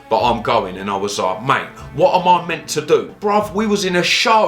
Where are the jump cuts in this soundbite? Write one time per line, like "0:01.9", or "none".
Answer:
0:03.1